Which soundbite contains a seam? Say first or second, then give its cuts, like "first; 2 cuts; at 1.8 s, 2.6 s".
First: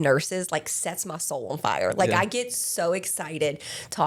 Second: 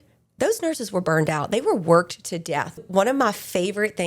second; 1 cut; at 2.8 s